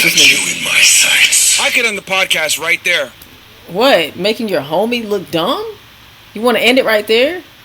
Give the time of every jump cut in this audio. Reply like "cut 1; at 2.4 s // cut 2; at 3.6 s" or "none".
cut 1; at 4.2 s